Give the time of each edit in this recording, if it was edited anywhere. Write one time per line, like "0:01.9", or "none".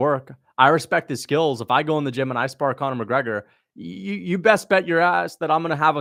none